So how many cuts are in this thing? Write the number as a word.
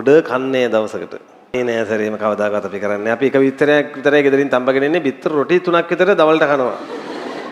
one